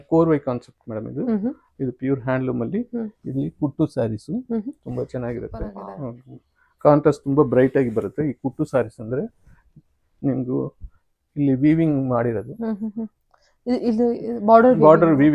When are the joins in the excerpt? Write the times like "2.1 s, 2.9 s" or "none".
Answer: 5.8 s